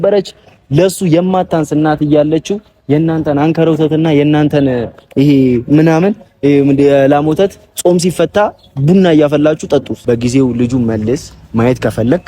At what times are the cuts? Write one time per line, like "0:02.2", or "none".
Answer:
0:09.9